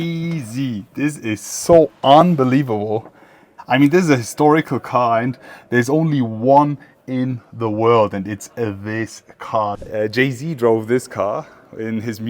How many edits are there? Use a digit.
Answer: 2